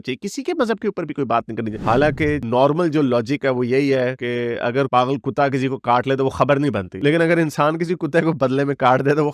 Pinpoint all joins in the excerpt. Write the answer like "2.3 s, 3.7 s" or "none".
1.7 s